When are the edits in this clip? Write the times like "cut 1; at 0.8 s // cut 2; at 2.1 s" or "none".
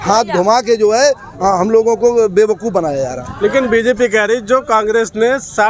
none